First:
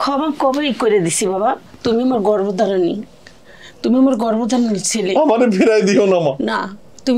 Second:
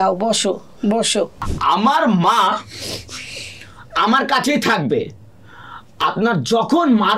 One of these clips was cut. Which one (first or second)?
second